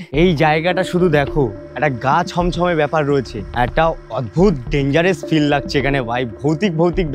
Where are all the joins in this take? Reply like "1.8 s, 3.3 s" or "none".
3.4 s